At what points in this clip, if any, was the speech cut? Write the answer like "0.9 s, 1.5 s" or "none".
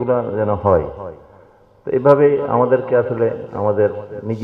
none